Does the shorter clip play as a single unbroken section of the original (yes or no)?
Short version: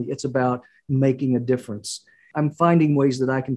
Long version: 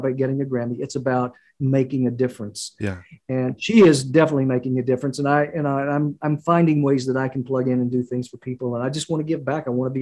no